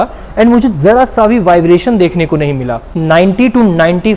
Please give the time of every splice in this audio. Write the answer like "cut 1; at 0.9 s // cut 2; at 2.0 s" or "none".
cut 1; at 2.9 s